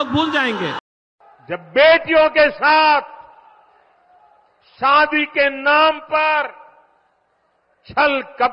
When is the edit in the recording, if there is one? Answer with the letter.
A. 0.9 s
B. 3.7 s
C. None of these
A